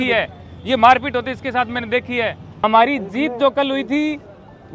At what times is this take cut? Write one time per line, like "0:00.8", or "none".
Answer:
0:02.5